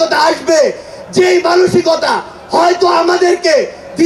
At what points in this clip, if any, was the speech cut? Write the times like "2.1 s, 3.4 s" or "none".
none